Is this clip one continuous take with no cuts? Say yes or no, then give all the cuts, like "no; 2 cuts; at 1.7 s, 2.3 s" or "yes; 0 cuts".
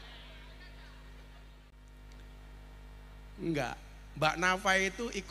no; 1 cut; at 1.7 s